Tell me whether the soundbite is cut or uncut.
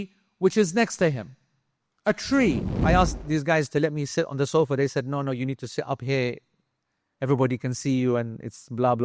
cut